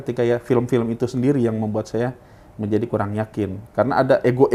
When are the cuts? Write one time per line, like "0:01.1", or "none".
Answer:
none